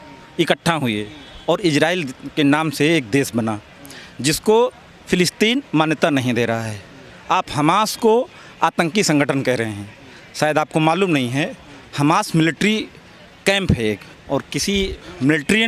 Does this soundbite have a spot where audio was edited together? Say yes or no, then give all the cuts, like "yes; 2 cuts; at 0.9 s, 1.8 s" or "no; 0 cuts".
no; 0 cuts